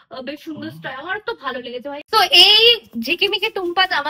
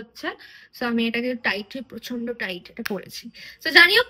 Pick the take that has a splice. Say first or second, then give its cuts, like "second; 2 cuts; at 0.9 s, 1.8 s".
first; 1 cut; at 2.0 s